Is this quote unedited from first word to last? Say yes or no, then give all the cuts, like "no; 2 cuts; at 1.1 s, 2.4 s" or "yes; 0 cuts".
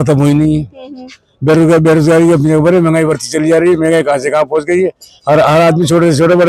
yes; 0 cuts